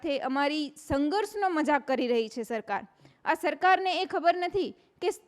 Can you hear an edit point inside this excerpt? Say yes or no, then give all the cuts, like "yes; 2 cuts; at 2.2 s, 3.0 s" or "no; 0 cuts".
no; 0 cuts